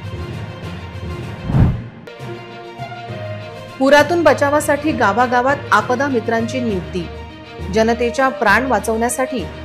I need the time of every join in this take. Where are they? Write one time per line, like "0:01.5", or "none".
0:01.4